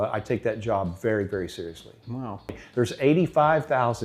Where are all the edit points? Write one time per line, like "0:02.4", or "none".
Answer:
0:02.6

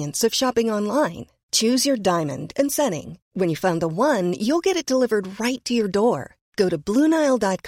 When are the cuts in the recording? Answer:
none

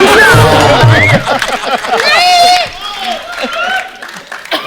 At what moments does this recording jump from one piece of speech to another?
none

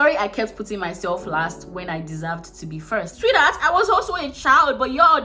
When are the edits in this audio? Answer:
0:03.1

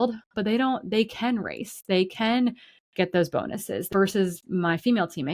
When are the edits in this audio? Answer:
0:03.9

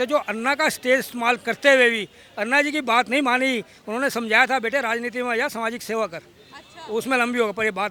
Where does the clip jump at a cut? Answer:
none

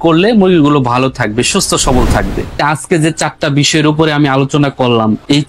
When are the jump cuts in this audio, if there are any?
0:02.6

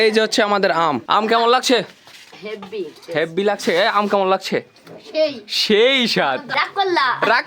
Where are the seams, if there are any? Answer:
0:01.0
0:06.5

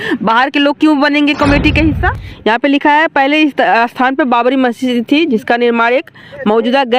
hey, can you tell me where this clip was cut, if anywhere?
0:02.1

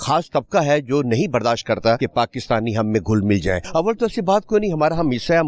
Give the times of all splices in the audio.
0:02.0
0:03.6

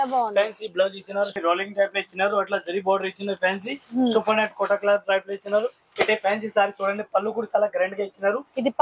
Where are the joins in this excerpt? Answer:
0:01.3
0:05.8

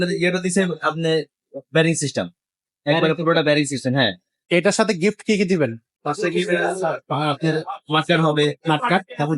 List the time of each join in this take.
0:04.4
0:05.9

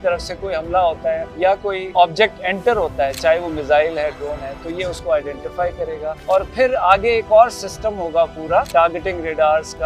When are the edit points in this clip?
0:01.4
0:06.1
0:08.7

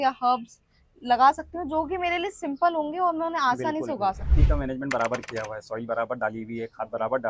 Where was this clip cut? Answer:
0:04.3

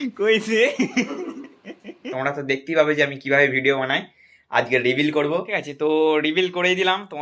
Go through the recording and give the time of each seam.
0:02.1
0:05.5

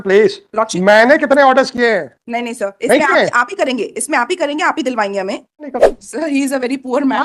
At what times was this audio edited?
0:05.7

